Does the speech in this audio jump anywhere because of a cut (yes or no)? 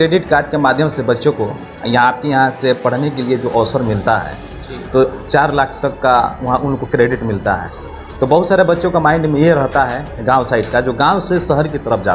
no